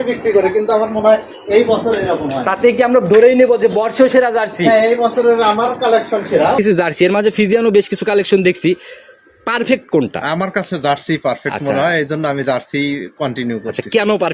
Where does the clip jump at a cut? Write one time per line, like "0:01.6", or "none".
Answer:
0:06.6